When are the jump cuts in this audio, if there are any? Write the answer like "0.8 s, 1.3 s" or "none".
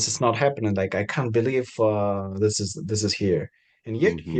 none